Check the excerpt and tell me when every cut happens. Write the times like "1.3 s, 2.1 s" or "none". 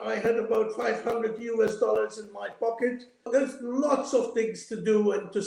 3.3 s